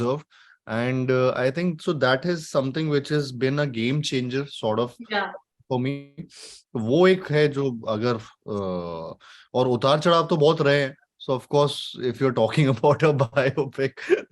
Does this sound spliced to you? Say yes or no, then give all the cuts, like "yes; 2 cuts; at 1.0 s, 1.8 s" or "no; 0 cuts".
no; 0 cuts